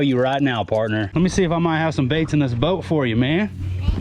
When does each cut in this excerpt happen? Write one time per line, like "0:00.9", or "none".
0:01.1